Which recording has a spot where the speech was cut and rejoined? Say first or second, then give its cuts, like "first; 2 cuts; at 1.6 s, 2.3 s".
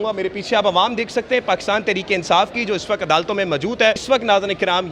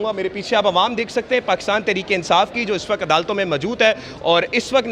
first; 1 cut; at 4.0 s